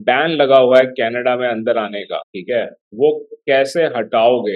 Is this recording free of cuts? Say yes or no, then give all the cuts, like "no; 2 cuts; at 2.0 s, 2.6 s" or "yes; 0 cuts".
no; 1 cut; at 2.3 s